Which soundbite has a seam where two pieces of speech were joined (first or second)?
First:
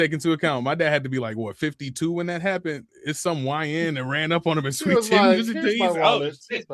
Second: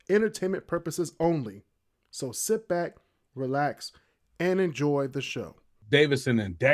second